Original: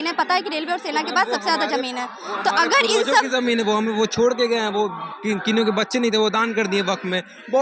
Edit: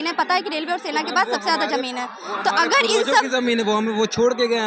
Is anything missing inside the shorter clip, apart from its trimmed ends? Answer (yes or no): no